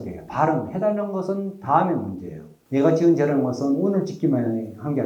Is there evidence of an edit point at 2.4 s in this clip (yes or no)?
yes